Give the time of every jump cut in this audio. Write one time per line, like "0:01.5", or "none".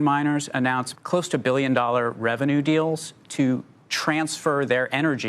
none